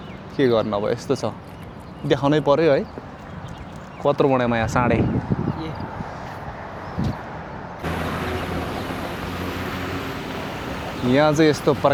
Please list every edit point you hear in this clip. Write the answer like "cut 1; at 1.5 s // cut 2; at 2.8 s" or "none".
none